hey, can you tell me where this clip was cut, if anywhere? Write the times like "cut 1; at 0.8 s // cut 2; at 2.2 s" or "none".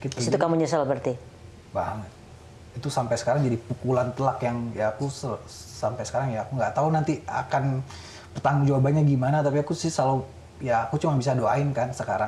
none